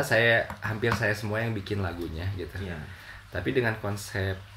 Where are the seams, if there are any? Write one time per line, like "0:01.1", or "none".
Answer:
none

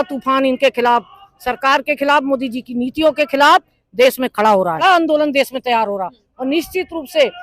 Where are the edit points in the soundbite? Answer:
0:04.8

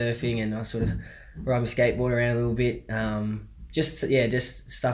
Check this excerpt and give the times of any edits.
none

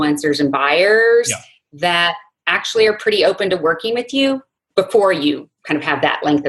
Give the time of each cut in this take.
0:04.6
0:05.5

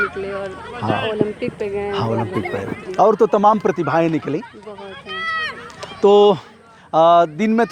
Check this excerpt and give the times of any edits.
none

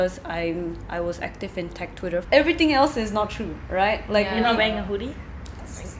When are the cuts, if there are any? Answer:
0:02.2

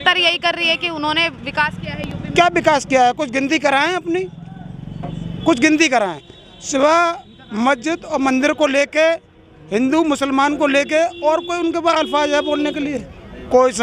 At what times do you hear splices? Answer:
none

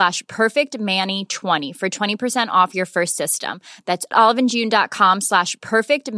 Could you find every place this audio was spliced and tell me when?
none

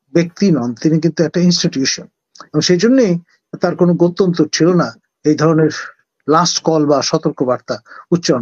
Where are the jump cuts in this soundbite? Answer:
none

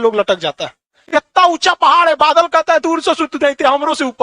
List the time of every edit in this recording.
0:00.9

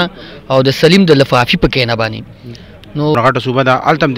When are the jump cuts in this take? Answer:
0:03.1

